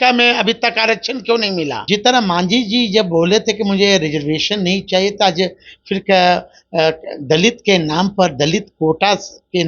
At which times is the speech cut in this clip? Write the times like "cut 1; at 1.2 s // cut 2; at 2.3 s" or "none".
cut 1; at 1.8 s